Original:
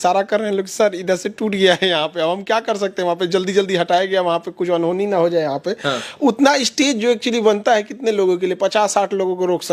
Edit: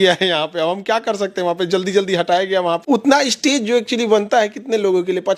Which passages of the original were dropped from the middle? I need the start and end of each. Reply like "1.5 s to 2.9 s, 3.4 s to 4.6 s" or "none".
4.4 s to 6.1 s

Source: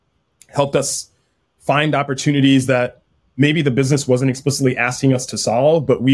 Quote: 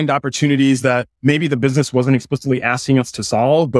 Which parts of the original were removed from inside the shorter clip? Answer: 3.0 s to 3.3 s

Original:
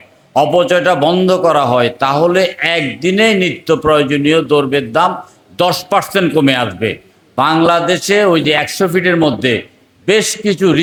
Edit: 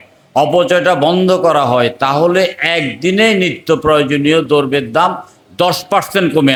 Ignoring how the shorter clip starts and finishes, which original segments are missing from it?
none

